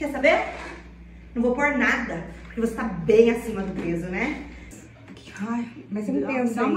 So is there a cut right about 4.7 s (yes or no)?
yes